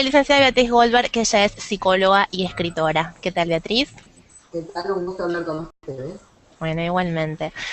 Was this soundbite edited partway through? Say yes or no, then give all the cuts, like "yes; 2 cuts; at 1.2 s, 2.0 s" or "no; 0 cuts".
yes; 1 cut; at 5.2 s